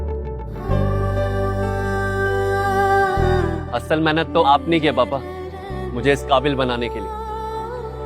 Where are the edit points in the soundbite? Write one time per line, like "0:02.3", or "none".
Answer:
0:03.4